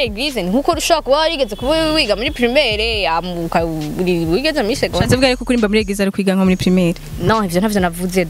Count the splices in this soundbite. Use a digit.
0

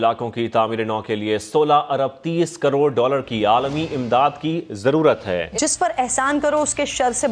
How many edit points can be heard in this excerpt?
1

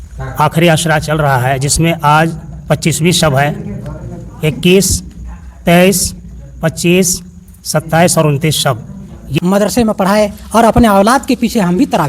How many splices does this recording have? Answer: 1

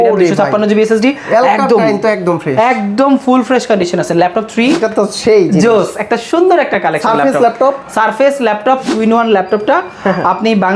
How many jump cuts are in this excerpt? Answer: 2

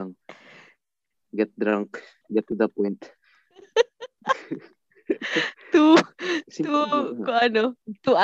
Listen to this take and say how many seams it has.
1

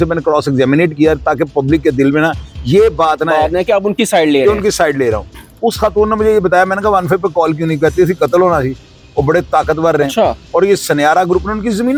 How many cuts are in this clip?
0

